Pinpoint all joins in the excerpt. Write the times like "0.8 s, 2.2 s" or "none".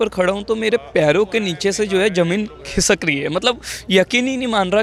none